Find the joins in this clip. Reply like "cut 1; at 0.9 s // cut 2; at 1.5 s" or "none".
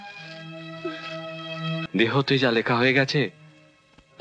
cut 1; at 1.9 s